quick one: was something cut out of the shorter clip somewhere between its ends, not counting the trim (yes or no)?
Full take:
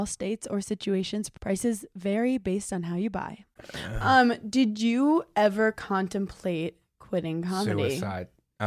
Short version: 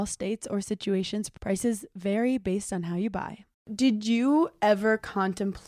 yes